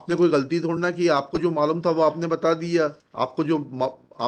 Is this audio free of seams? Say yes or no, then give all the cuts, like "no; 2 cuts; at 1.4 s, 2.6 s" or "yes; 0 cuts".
yes; 0 cuts